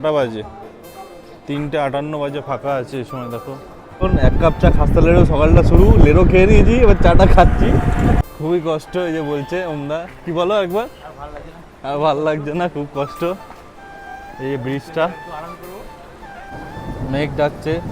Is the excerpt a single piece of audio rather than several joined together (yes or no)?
no